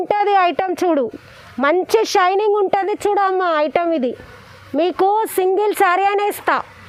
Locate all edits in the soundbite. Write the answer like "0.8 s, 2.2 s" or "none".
none